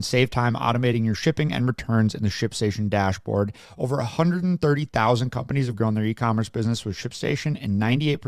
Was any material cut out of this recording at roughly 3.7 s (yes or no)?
yes